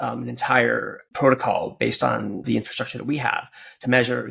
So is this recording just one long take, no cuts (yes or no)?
no